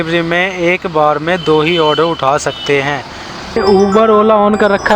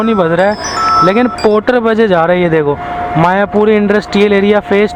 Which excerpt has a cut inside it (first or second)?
first